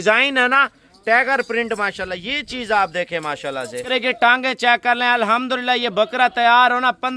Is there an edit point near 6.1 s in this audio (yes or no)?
no